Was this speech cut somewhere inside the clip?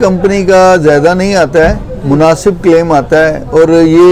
no; 0 cuts

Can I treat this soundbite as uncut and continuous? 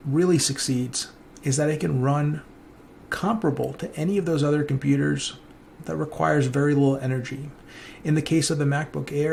yes; 0 cuts

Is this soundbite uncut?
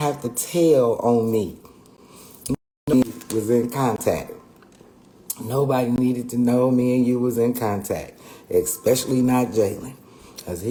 yes; 0 cuts

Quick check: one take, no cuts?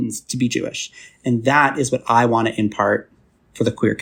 yes; 0 cuts

